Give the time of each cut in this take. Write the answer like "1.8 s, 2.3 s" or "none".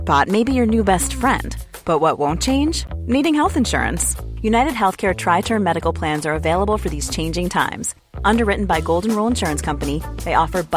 none

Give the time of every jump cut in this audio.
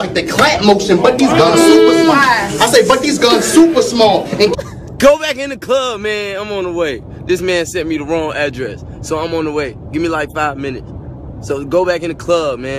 none

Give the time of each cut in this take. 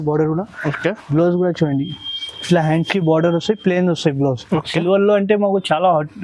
4.6 s

